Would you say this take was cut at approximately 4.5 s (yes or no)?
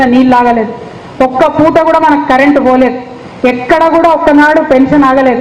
yes